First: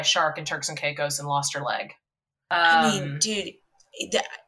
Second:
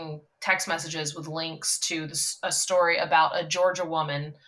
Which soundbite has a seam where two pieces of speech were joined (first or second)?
first